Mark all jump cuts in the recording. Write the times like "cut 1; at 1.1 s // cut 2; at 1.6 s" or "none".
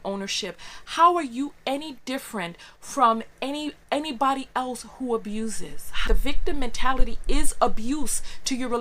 cut 1; at 6.0 s